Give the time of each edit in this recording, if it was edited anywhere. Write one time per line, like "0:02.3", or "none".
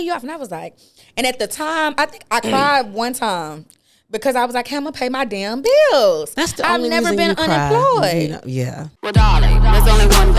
0:09.0

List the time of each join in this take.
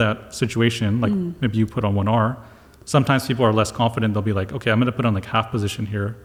none

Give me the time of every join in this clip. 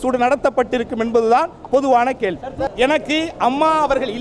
0:02.7

